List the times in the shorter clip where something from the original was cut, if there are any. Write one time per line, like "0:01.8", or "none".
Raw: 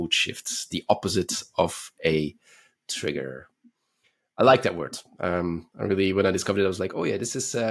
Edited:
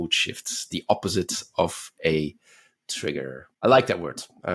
0:03.4